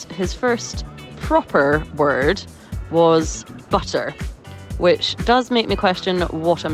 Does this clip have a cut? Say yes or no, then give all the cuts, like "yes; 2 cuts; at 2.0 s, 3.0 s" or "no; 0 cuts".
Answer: no; 0 cuts